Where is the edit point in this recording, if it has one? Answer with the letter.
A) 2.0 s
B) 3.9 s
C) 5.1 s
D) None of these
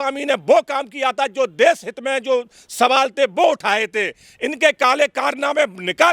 D